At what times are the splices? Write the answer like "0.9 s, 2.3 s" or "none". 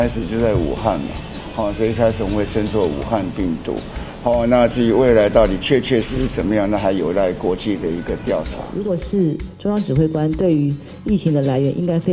8.7 s